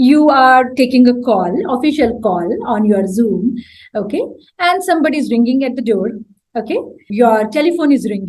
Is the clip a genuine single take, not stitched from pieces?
no; 1 cut; at 7.0 s

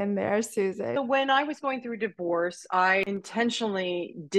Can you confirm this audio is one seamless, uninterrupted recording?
no; 2 cuts; at 0.9 s, 3.0 s

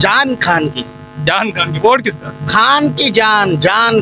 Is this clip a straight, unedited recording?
yes; 0 cuts

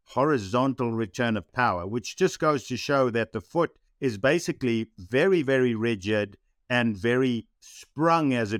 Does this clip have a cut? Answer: yes; 2 cuts; at 1.5 s, 7.6 s

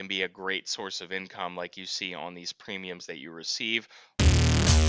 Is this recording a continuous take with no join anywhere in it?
no; 1 cut; at 4.0 s

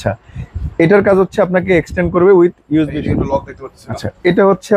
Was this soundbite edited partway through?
yes; 1 cut; at 3.0 s

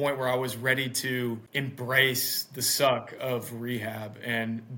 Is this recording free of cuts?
no; 1 cut; at 1.5 s

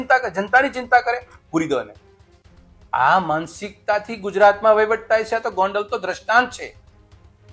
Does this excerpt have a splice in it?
no; 0 cuts

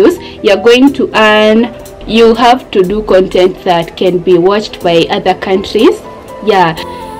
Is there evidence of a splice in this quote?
yes; 1 cut; at 2.0 s

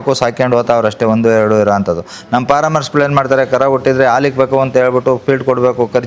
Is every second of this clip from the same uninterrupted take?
yes; 0 cuts

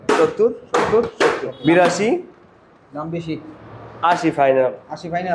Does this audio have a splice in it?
yes; 1 cut; at 1.5 s

